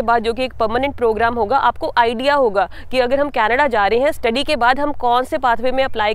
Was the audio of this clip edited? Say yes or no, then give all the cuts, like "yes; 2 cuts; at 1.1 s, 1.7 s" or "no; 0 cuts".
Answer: no; 0 cuts